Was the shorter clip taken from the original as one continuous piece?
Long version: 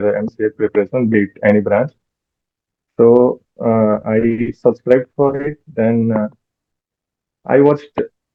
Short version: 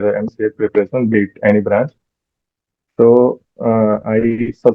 yes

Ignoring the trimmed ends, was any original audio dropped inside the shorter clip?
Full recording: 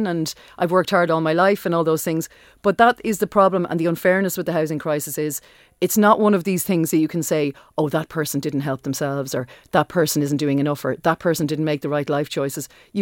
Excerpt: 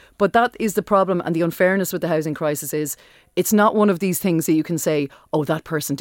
no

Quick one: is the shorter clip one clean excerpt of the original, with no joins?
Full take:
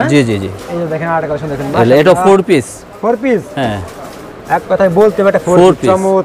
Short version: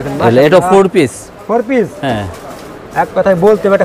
yes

